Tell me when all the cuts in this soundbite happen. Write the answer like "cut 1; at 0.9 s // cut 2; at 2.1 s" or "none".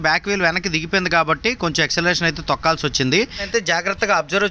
cut 1; at 3.4 s